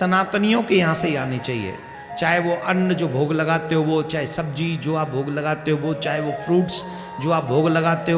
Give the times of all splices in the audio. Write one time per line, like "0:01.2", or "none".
none